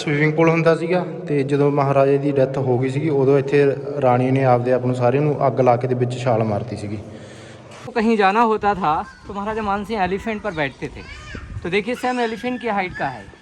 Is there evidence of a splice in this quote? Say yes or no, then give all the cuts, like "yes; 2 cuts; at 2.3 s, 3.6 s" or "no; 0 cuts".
yes; 1 cut; at 7.9 s